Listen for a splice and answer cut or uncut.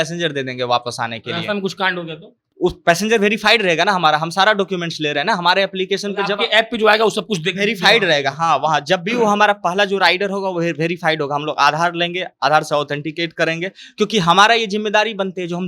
uncut